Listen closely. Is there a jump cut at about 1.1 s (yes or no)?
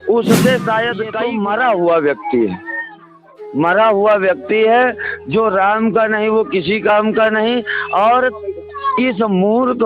yes